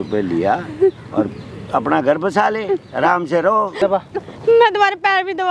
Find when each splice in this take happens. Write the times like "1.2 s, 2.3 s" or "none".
3.8 s